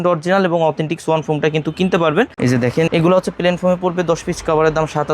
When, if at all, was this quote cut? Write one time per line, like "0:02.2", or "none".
0:02.3